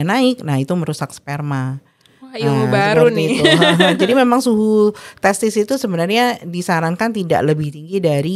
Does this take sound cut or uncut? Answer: uncut